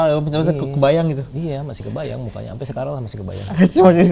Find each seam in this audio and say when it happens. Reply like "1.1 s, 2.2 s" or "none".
none

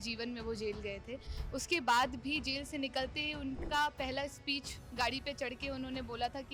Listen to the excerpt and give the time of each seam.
none

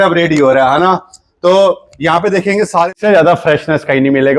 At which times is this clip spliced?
2.9 s

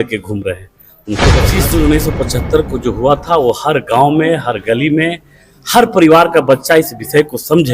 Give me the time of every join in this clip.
1.4 s

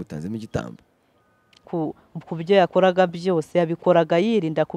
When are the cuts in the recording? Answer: 1.7 s

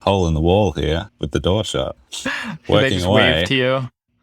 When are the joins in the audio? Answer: 1.1 s, 2.0 s

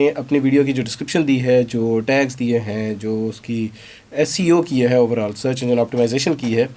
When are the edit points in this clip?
none

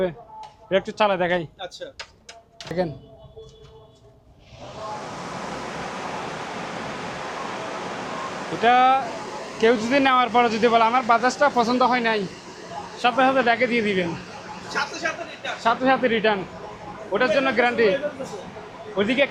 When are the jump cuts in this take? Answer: none

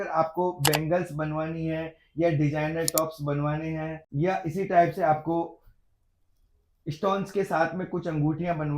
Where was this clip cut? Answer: 4.0 s

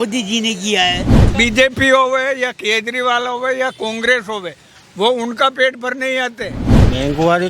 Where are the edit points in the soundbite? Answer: 1.3 s, 6.6 s

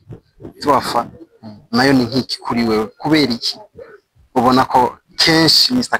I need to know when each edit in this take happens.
none

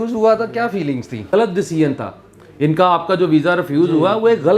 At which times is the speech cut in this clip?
1.3 s

